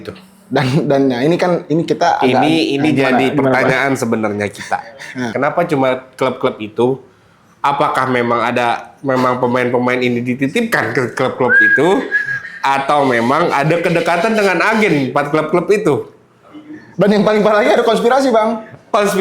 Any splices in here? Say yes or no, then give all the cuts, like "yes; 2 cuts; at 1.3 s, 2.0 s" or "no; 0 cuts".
yes; 1 cut; at 5.3 s